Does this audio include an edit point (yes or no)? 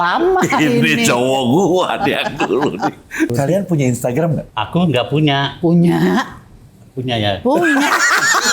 yes